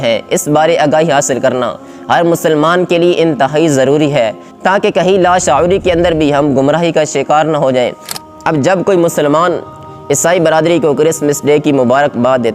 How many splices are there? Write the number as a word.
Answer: one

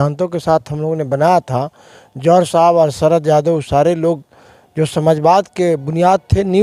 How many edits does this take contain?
zero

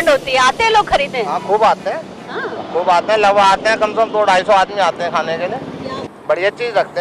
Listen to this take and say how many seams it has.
one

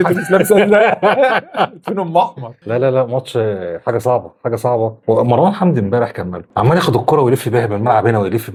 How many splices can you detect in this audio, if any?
zero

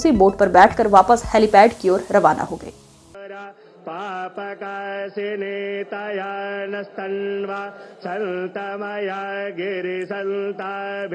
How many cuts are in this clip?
one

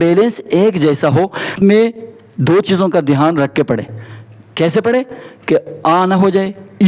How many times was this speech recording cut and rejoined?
one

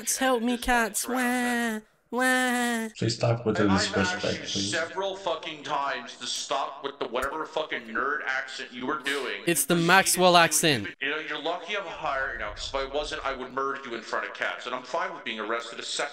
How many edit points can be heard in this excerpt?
zero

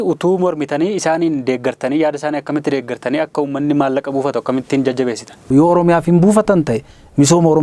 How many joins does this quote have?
one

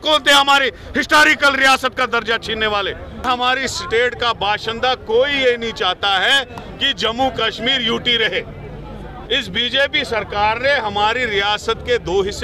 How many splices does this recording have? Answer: one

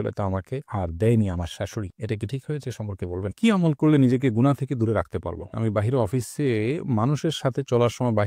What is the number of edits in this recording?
two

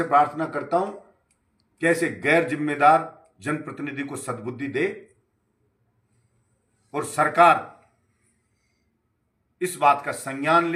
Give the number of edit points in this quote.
zero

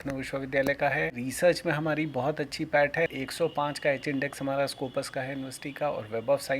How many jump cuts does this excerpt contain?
two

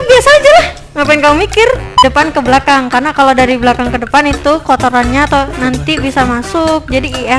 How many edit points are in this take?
one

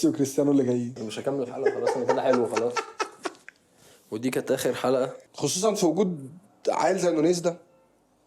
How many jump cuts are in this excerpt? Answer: two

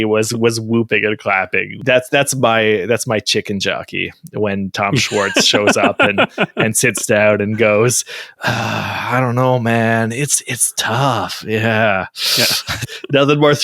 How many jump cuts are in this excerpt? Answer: two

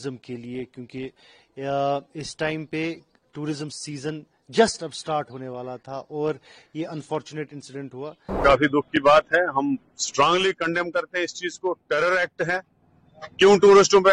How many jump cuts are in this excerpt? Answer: one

